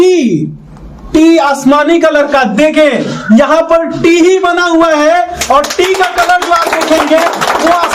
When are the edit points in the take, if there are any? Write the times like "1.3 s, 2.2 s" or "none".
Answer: none